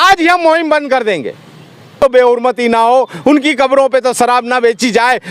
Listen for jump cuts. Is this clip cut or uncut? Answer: cut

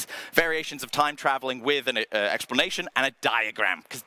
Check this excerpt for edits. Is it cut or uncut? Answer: uncut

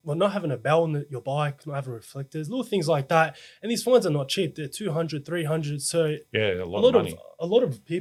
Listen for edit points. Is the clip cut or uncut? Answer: uncut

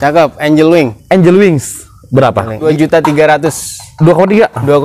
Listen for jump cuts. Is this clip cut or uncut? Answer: cut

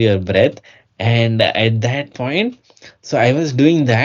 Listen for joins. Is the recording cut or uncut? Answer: uncut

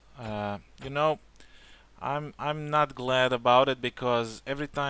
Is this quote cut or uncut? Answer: cut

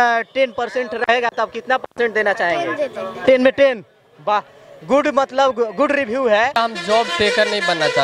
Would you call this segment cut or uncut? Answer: cut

